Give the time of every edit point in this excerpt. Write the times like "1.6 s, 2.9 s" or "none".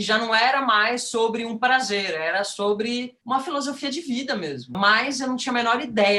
3.1 s, 4.7 s